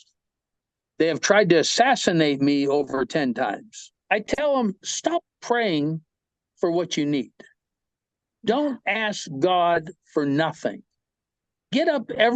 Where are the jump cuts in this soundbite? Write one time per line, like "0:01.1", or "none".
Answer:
0:03.9